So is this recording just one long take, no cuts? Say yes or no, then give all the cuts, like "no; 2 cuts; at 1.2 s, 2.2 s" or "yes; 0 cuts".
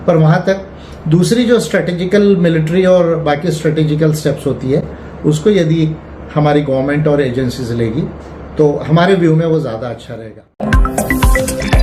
no; 1 cut; at 10.6 s